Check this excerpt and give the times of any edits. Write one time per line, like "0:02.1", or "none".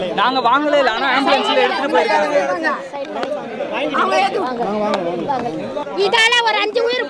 0:05.8

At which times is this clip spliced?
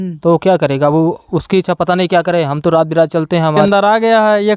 0:03.6

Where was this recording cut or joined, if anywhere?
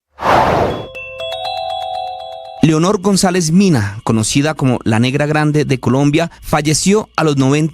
0:02.5

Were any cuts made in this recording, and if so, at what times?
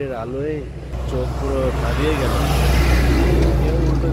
0:01.0

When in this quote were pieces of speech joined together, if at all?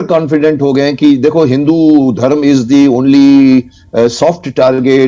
none

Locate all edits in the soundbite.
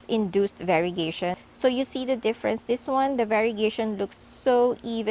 0:01.4

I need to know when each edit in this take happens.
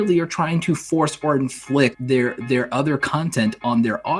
0:02.0

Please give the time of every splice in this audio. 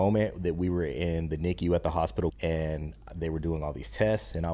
0:02.3

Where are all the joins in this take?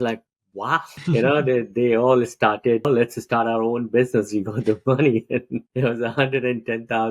0:00.9
0:02.9
0:05.7

